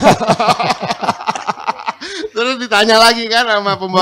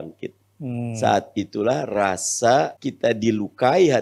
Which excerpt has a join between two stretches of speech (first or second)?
second